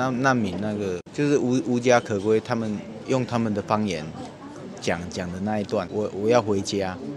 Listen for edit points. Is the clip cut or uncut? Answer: cut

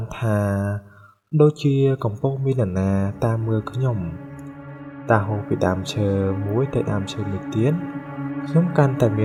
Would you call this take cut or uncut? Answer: uncut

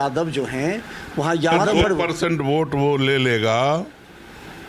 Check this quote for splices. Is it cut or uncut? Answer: cut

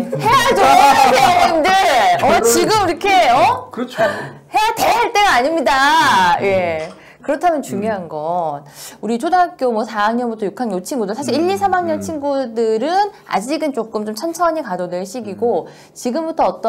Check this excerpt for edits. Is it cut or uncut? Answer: uncut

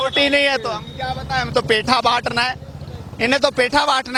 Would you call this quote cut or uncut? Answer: uncut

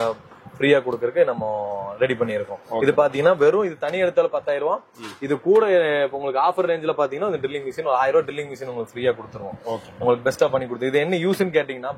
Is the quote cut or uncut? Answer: uncut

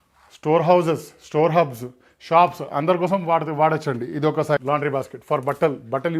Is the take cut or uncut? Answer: cut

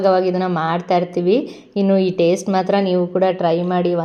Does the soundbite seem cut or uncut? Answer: uncut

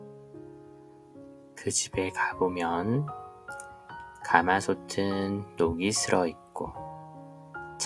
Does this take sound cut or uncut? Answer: cut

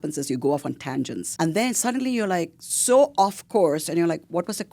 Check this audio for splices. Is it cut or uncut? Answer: cut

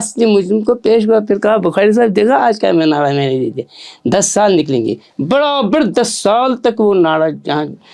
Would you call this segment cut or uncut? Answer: uncut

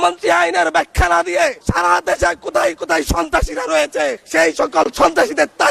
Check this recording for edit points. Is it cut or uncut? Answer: cut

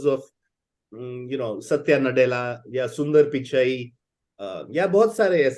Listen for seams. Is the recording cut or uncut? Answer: uncut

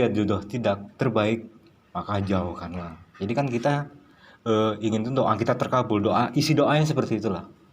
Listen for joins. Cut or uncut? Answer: uncut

